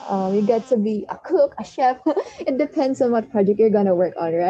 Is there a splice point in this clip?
no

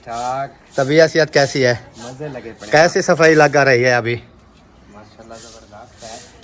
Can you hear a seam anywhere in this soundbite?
no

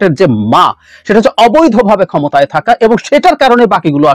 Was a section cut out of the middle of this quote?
no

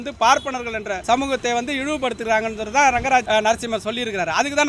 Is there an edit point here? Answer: yes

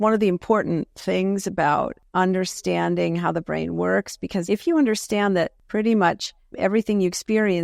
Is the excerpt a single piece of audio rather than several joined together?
no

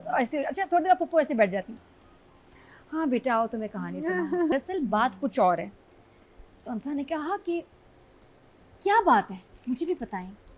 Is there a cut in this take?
yes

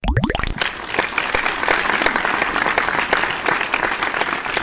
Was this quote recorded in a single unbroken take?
yes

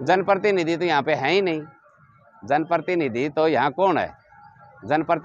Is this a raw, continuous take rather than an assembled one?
yes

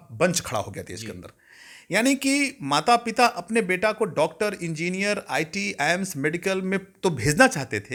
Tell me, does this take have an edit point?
no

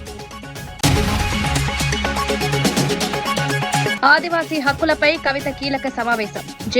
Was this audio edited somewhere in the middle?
yes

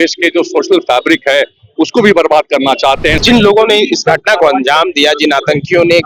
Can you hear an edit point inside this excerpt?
yes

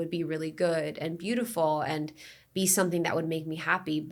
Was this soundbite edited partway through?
no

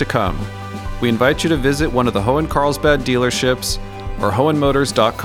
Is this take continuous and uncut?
yes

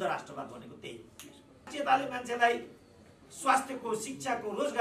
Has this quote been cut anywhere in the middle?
yes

